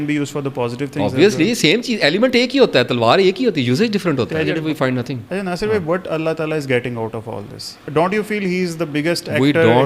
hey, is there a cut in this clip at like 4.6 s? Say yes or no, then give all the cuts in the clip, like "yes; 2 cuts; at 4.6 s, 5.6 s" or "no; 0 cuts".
yes; 2 cuts; at 4.6 s, 7.8 s